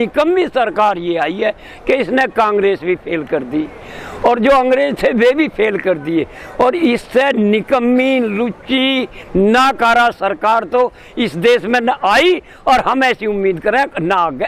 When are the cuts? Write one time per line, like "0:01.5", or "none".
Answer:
none